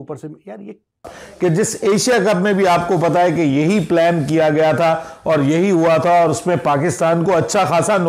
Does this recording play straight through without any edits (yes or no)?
no